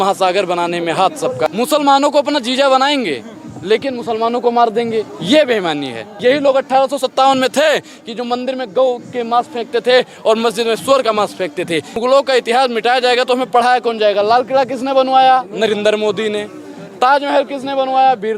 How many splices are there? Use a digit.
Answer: 3